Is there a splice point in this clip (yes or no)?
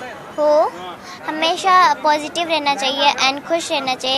no